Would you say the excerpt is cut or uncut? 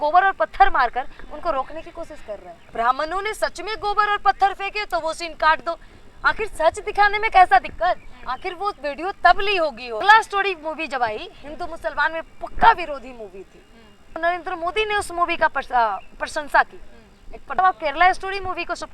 cut